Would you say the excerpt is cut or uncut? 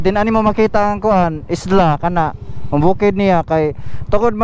uncut